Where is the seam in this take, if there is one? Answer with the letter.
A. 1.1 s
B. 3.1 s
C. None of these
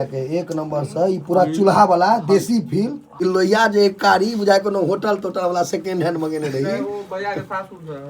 B